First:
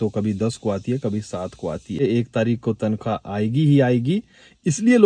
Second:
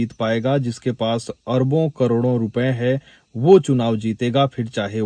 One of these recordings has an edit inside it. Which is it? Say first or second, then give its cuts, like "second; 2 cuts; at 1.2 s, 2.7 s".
first; 1 cut; at 2.0 s